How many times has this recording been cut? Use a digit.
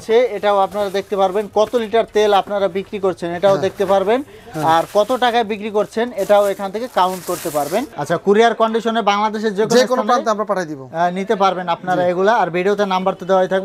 1